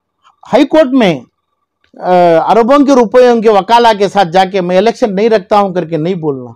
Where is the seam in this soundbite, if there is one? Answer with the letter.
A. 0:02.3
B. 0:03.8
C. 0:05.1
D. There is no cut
D